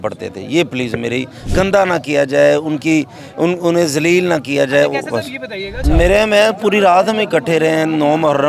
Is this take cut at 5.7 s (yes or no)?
yes